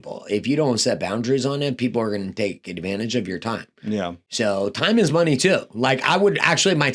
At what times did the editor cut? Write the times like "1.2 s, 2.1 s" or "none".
none